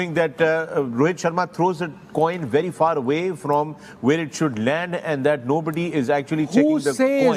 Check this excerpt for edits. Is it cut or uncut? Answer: uncut